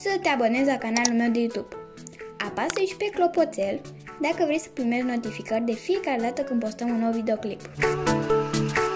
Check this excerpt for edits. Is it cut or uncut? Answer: cut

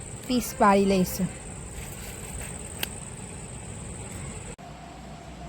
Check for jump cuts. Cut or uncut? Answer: cut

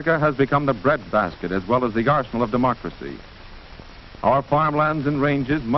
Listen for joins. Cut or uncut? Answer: cut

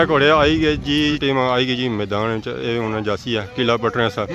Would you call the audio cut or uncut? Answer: cut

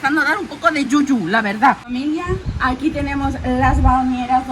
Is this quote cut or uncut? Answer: cut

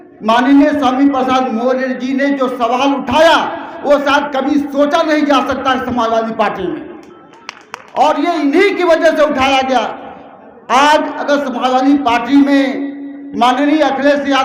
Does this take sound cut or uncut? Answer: uncut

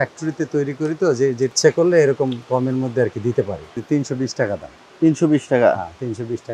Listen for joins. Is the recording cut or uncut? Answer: cut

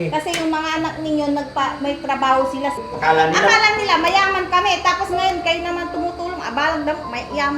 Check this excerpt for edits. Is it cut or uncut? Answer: cut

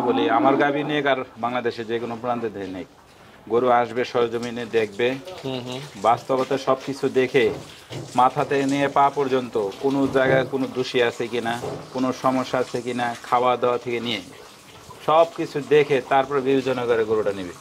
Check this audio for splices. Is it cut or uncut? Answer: uncut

